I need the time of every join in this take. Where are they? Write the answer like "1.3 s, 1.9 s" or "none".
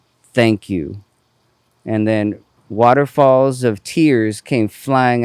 2.5 s

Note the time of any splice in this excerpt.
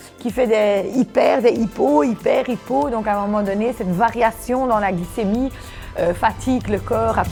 none

